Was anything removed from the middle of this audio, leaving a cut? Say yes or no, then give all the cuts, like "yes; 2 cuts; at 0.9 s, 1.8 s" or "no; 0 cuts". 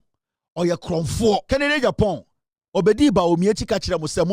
yes; 1 cut; at 1.4 s